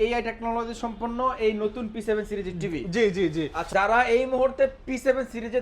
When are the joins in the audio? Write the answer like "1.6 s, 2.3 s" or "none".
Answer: 3.7 s